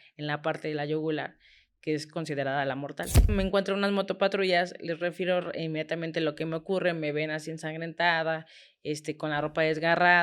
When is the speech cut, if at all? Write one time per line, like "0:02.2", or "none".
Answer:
0:03.3